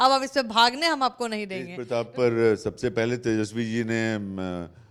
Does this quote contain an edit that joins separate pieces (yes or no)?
yes